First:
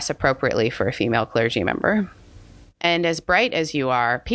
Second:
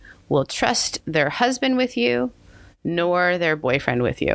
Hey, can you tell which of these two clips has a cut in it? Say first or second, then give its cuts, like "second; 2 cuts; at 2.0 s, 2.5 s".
first; 1 cut; at 2.7 s